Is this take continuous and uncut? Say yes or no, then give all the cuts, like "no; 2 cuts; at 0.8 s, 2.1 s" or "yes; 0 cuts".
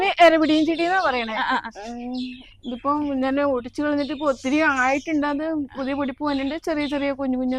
yes; 0 cuts